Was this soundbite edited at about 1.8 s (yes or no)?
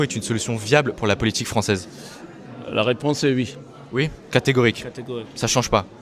no